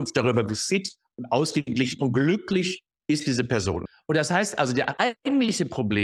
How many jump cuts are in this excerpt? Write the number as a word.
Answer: two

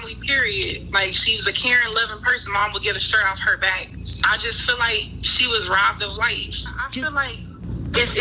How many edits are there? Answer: one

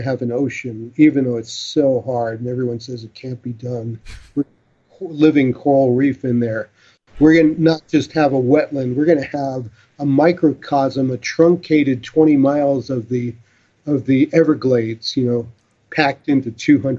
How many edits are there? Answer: zero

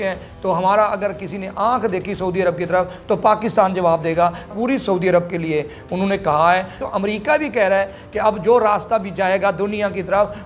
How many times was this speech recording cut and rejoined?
two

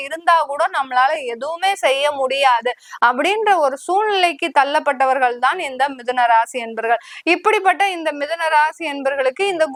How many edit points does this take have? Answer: zero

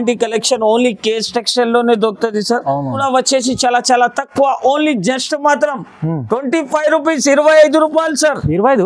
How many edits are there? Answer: one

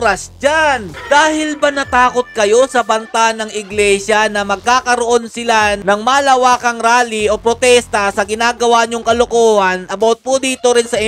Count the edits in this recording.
one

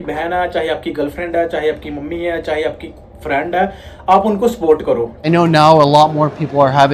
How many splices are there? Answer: one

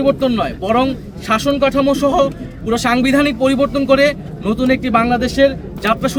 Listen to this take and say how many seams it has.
zero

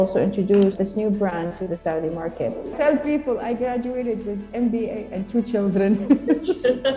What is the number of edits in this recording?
two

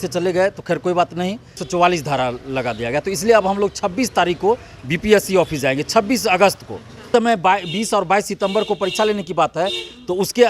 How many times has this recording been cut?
two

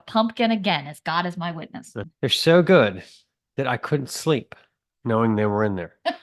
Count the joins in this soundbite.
one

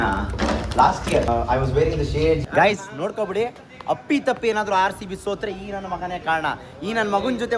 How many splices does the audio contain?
two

